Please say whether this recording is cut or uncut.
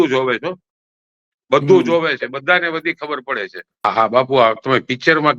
cut